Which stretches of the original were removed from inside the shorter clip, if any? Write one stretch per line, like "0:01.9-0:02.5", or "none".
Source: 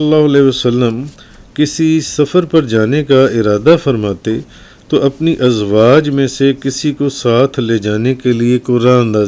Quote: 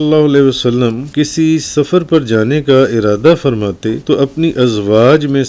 0:01.0-0:01.4
0:04.4-0:04.8